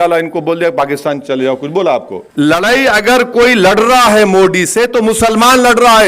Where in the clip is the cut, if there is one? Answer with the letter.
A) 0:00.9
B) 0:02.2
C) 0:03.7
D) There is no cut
B